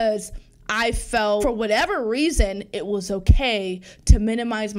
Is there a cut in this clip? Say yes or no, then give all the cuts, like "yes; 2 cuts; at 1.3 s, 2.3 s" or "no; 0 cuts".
yes; 1 cut; at 1.4 s